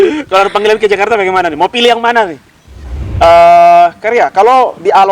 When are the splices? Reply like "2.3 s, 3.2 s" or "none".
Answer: 3.0 s

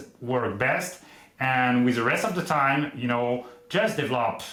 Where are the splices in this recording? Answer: none

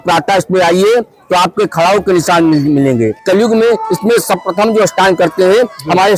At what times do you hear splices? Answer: 3.2 s

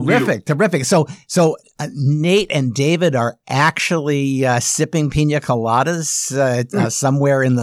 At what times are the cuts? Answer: none

